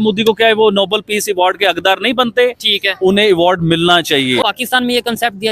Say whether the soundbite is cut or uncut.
cut